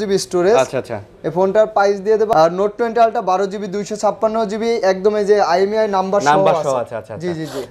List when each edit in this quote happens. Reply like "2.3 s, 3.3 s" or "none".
2.3 s